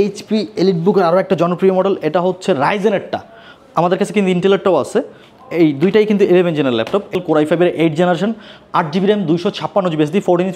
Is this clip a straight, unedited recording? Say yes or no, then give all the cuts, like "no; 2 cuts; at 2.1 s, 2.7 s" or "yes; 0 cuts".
no; 1 cut; at 7.1 s